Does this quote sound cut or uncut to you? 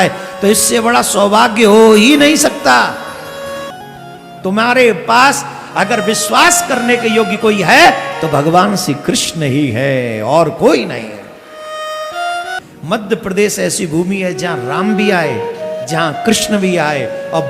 cut